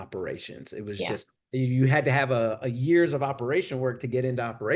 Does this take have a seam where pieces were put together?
no; 0 cuts

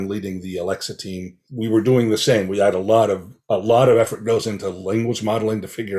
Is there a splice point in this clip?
yes; 1 cut; at 1.4 s

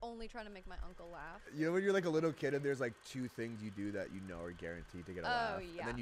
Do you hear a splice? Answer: yes; 1 cut; at 1.5 s

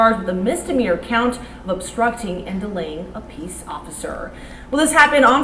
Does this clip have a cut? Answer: no; 0 cuts

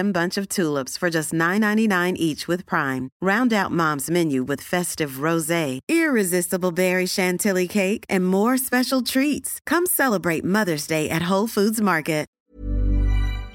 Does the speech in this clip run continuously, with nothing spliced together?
no; 1 cut; at 12.3 s

